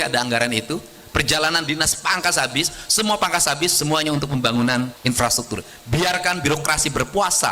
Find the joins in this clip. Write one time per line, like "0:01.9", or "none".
0:05.0